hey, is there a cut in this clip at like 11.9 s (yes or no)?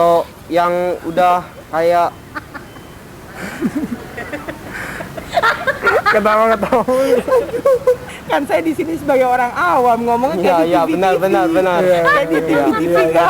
no